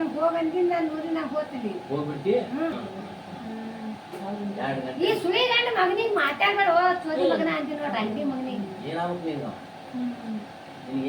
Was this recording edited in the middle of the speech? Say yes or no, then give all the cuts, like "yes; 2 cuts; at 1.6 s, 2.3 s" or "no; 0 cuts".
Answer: yes; 1 cut; at 2.7 s